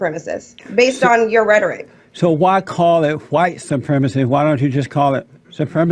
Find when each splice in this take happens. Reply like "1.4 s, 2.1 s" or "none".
none